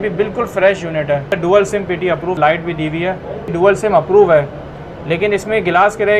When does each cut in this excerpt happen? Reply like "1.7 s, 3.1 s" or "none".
1.4 s, 2.4 s, 3.5 s